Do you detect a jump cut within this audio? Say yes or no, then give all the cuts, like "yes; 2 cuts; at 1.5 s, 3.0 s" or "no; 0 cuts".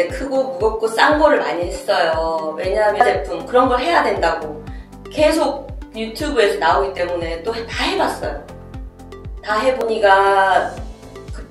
yes; 2 cuts; at 3.0 s, 9.8 s